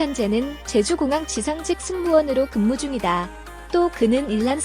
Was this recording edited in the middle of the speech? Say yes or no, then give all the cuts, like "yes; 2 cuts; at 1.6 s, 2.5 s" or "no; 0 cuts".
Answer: no; 0 cuts